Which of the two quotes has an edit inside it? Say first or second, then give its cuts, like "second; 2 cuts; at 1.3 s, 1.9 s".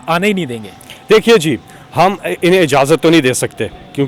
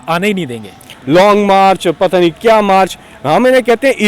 second; 1 cut; at 0.9 s